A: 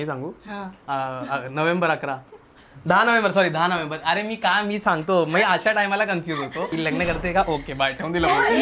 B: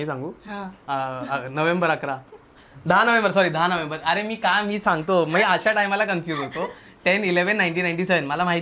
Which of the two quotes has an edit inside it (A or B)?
A